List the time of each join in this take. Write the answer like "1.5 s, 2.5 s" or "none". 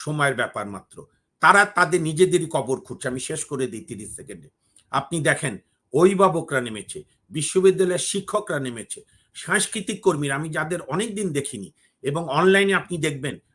none